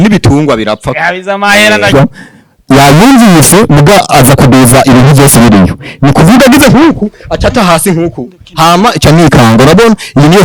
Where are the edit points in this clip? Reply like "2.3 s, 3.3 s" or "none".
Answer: 1.9 s